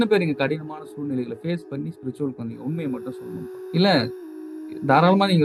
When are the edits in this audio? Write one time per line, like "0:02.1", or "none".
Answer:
none